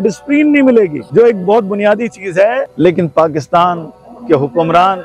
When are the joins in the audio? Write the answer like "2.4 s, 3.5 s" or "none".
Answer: 1.0 s, 2.7 s